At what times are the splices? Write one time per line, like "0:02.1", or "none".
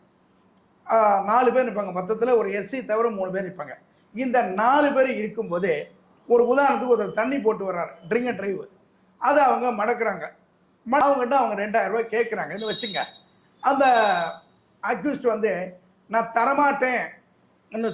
0:11.0